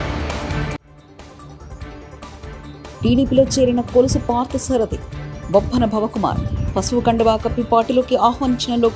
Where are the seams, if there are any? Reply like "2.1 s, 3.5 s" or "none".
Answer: 2.7 s